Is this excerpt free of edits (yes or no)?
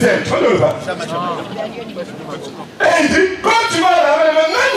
no